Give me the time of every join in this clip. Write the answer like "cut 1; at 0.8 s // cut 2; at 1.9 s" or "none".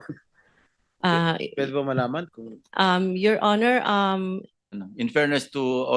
cut 1; at 4.7 s